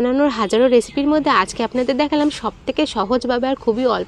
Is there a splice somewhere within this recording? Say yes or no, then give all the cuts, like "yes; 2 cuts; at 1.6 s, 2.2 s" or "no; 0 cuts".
no; 0 cuts